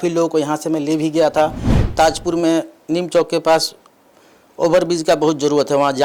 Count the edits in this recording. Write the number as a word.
one